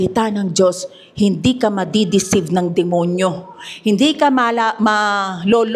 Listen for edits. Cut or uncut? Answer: uncut